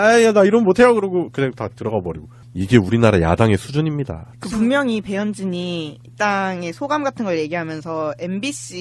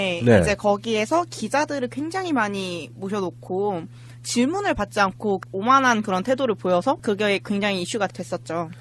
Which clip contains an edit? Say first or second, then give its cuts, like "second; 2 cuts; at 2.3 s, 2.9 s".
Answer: first; 1 cut; at 2.7 s